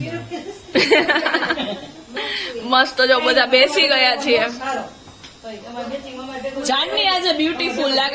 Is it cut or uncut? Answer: uncut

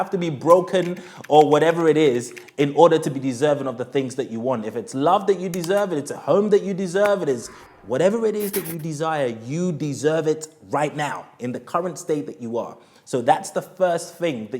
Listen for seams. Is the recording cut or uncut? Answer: uncut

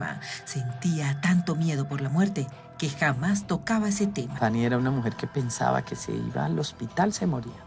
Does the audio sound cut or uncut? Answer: cut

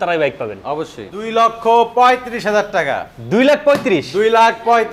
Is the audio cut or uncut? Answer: cut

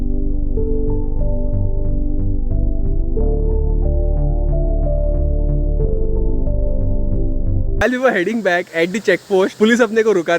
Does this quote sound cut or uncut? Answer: cut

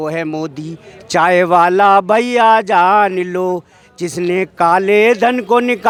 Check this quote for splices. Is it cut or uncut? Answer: uncut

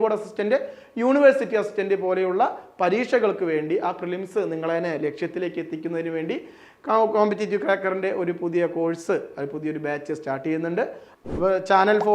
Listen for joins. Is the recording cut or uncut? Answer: cut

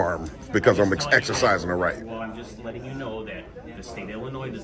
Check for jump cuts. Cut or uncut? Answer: uncut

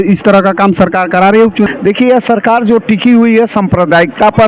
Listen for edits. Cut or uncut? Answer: cut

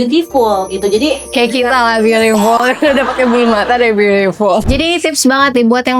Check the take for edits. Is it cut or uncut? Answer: cut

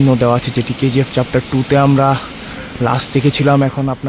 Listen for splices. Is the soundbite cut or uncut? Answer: uncut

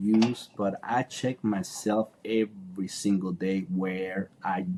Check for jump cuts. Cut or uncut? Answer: uncut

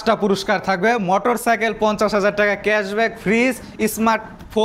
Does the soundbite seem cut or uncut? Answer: uncut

